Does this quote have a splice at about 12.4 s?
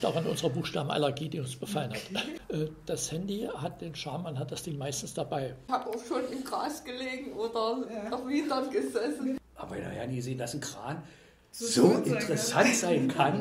no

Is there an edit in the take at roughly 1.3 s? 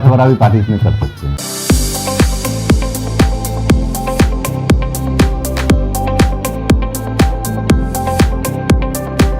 yes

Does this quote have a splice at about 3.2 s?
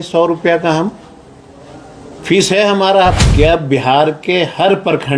yes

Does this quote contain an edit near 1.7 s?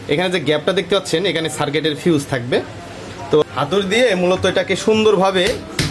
no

